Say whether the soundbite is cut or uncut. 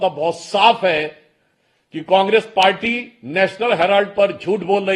uncut